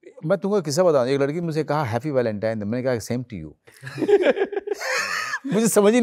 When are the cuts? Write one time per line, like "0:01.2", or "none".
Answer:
none